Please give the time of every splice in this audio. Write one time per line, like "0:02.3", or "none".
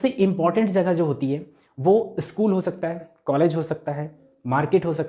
none